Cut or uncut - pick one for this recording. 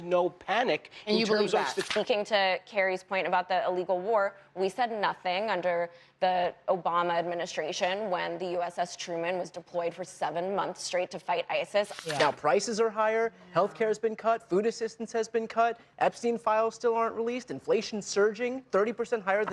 cut